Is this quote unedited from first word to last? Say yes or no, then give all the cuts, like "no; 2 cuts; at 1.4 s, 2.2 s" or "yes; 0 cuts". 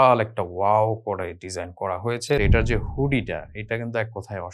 no; 1 cut; at 2.4 s